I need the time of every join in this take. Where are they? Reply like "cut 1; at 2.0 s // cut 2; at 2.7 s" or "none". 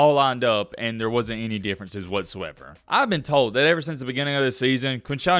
none

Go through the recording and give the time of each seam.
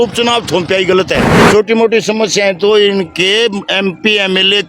cut 1; at 1.4 s

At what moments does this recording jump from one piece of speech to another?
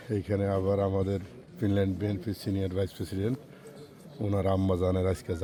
none

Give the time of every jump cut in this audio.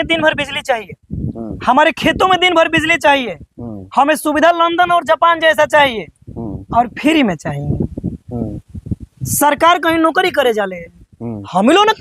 cut 1; at 8.6 s

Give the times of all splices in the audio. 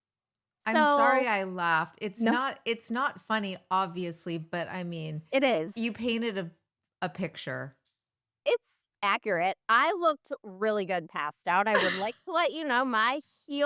none

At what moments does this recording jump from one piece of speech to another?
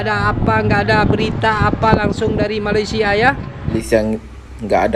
cut 1; at 3.8 s

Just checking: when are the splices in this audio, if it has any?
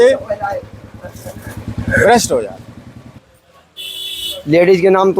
cut 1; at 3.2 s

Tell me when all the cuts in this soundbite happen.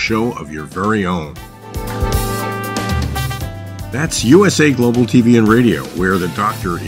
none

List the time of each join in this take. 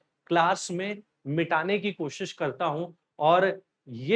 none

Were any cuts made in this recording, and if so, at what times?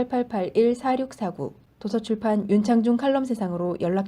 cut 1; at 1.5 s

